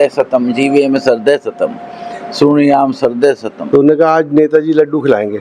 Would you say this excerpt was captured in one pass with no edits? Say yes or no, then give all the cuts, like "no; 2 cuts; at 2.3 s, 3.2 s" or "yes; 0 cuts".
no; 1 cut; at 3.6 s